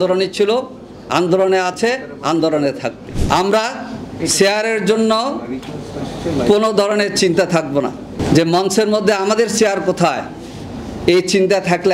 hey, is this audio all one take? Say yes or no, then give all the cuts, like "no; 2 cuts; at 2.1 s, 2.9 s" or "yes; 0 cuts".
no; 2 cuts; at 3.1 s, 8.2 s